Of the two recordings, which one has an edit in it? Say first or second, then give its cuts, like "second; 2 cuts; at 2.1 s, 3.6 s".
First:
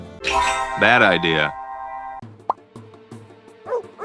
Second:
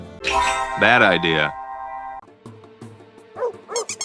second; 1 cut; at 2.3 s